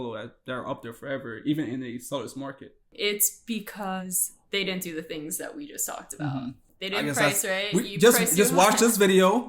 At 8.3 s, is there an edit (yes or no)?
no